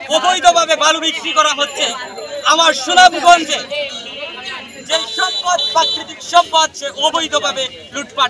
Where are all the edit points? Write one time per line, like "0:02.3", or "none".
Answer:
none